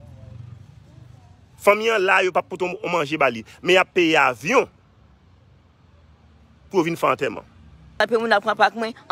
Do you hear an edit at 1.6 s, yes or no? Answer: no